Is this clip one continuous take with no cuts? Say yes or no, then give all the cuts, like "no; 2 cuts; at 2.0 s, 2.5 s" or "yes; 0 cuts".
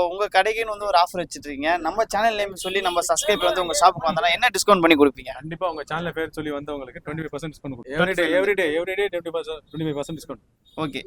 no; 1 cut; at 7.8 s